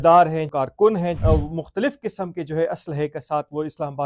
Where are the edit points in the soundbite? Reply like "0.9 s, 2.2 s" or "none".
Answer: 0.9 s